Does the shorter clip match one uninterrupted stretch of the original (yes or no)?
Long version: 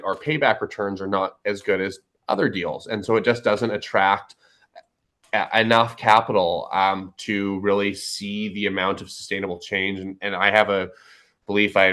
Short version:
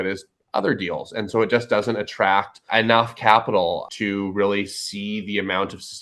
no